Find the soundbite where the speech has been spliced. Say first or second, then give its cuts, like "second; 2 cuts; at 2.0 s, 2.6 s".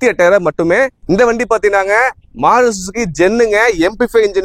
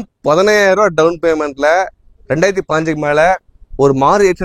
first; 1 cut; at 1.0 s